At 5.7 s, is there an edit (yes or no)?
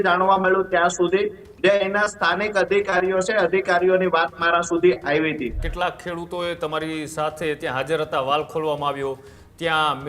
yes